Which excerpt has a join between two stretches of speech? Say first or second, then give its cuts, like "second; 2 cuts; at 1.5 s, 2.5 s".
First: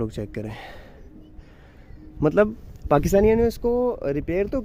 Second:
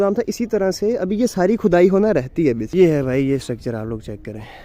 second; 1 cut; at 2.6 s